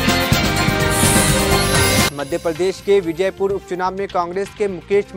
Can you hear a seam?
yes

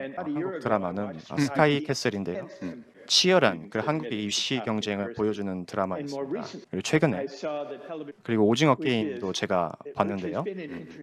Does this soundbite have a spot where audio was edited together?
no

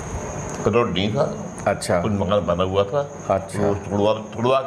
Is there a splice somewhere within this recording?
no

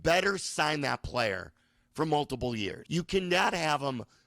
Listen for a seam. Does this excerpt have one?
yes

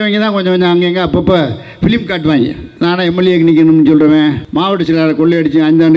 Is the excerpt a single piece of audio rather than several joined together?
no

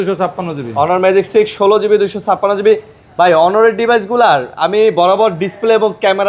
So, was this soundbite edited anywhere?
no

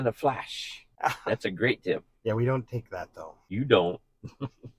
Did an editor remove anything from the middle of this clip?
yes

